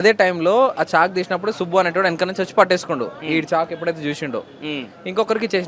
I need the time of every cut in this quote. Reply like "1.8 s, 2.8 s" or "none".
none